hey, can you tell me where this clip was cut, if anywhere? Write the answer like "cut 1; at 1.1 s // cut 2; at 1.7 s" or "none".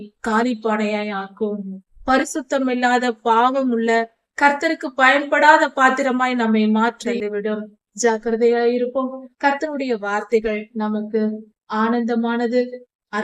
cut 1; at 7.2 s